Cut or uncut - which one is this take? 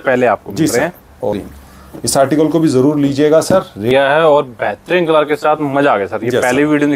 cut